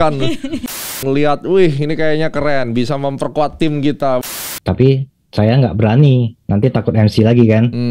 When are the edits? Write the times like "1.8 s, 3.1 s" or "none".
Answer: 1.0 s, 4.2 s